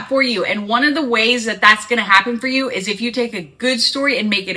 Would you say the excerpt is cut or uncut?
uncut